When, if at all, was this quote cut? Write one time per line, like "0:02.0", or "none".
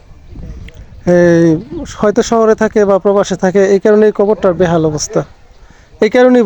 none